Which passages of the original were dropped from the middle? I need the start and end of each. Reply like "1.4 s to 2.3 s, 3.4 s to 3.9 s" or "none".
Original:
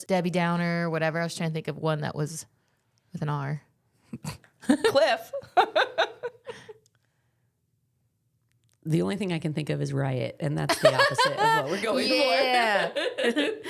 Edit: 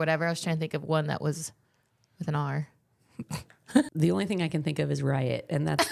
4.8 s to 8.8 s